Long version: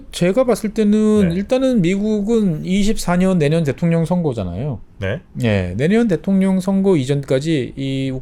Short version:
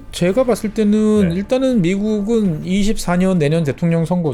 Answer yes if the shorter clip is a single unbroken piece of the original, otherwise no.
yes